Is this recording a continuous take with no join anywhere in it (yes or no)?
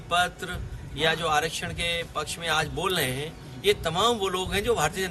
yes